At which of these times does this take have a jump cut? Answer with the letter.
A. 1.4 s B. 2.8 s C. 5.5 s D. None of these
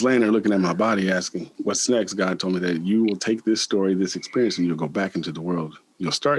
A